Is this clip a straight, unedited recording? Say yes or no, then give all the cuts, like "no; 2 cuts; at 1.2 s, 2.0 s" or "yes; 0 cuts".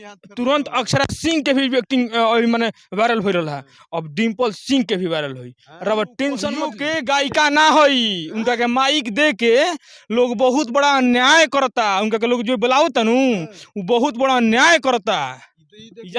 no; 1 cut; at 6.8 s